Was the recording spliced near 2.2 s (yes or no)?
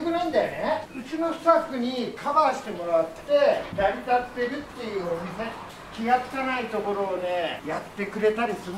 no